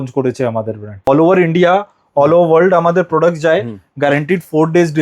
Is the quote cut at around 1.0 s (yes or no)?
yes